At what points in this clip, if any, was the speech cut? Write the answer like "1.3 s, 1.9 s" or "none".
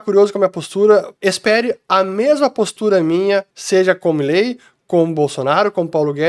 1.1 s, 3.6 s